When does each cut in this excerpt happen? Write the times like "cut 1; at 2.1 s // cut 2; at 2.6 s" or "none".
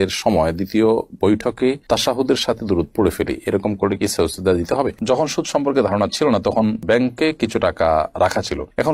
cut 1; at 5.0 s